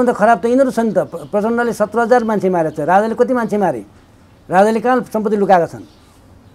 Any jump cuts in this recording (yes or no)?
no